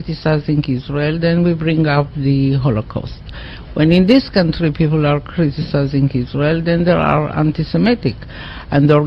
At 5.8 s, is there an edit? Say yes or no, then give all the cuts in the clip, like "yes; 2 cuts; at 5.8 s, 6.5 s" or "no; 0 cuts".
no; 0 cuts